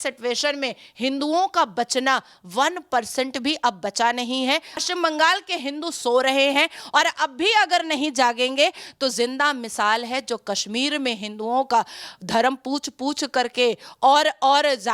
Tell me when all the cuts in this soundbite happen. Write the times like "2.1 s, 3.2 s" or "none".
4.8 s